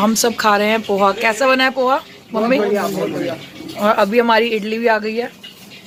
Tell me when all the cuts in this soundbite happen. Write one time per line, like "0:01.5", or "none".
none